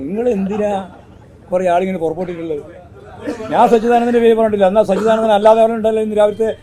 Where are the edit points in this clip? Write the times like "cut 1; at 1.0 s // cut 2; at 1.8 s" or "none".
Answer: none

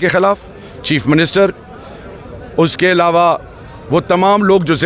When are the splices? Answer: none

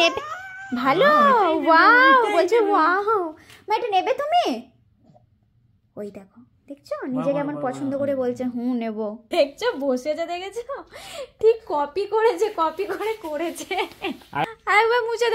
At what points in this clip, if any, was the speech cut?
cut 1; at 9.3 s // cut 2; at 14.4 s

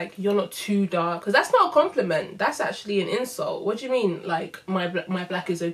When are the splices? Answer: cut 1; at 1.2 s

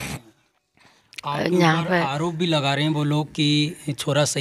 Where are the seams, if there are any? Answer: none

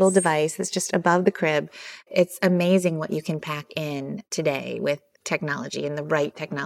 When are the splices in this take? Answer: cut 1; at 2.1 s // cut 2; at 4.3 s

